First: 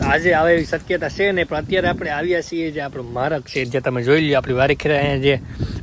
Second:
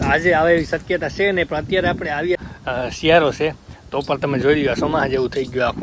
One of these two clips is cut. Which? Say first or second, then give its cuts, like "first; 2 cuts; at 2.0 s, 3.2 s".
second; 1 cut; at 2.4 s